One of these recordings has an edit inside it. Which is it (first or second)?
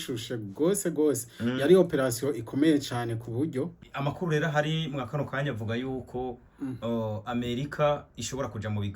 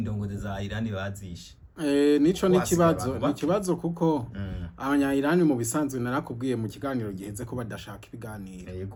first